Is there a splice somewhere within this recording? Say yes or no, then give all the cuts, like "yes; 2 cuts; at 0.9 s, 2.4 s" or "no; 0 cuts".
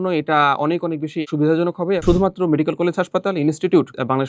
yes; 2 cuts; at 1.2 s, 2.0 s